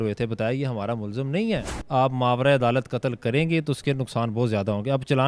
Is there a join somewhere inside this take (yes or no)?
yes